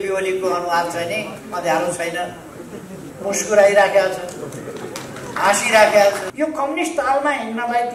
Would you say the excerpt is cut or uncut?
cut